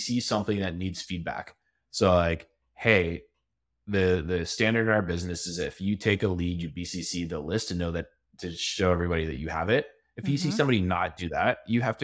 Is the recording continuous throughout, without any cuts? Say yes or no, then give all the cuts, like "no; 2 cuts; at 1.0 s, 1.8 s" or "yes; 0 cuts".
yes; 0 cuts